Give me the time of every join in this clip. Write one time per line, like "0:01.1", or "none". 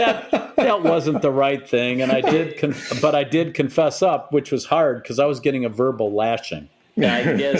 none